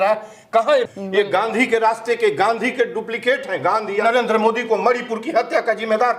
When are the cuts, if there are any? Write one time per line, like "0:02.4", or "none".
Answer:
0:00.9
0:04.0